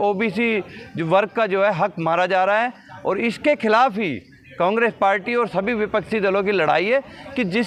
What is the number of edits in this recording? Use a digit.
0